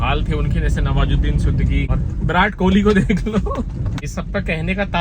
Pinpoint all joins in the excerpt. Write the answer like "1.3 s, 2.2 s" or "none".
1.9 s, 4.0 s